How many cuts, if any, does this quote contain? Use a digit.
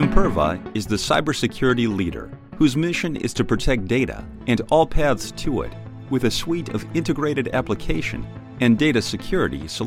0